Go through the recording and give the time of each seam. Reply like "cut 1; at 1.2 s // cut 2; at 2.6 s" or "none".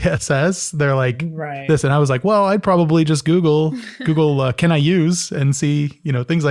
none